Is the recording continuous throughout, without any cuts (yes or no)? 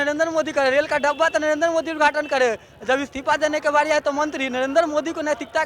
yes